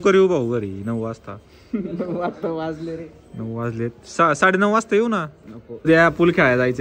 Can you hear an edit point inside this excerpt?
yes; 1 cut; at 5.9 s

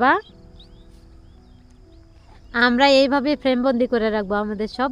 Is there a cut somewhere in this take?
no; 0 cuts

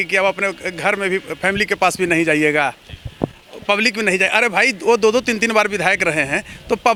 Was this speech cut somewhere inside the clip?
no; 0 cuts

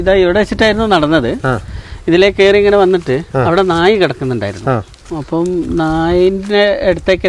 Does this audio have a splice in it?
no; 0 cuts

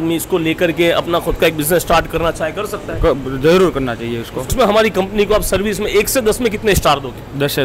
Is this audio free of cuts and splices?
no; 1 cut; at 4.5 s

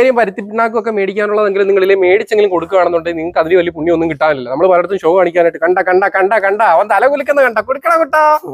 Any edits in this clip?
no; 0 cuts

